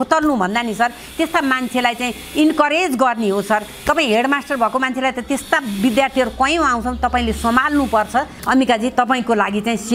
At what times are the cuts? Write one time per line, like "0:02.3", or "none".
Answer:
0:08.4